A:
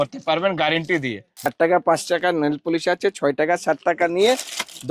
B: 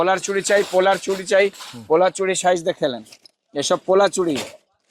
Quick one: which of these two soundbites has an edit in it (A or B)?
A